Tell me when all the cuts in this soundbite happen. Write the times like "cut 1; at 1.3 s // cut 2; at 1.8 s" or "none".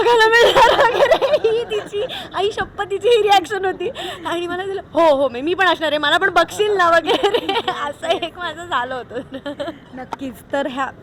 none